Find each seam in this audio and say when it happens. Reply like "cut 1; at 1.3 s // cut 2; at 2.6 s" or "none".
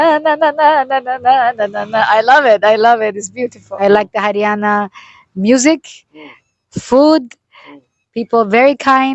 cut 1; at 3.6 s